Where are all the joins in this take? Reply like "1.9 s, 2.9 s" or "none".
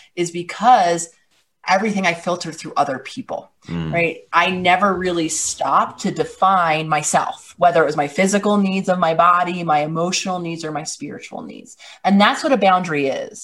1.6 s